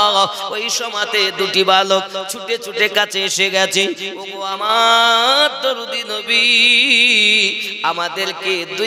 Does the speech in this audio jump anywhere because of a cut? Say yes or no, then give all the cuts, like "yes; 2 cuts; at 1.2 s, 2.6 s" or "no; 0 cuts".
no; 0 cuts